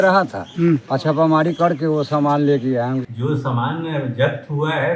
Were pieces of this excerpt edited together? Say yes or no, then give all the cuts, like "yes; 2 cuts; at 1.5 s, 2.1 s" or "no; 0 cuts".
yes; 2 cuts; at 0.9 s, 3.1 s